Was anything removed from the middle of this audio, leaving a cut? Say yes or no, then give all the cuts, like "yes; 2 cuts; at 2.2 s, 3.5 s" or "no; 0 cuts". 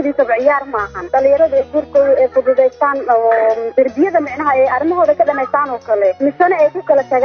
yes; 3 cuts; at 0.9 s, 3.7 s, 6.2 s